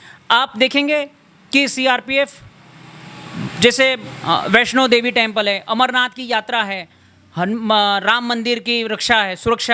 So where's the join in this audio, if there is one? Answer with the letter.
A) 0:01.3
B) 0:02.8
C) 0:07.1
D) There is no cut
D